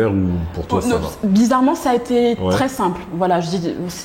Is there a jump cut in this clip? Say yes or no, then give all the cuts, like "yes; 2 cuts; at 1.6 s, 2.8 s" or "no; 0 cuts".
no; 0 cuts